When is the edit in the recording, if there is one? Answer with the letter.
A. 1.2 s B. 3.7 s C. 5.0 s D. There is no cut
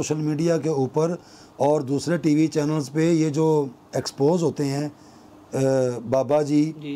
D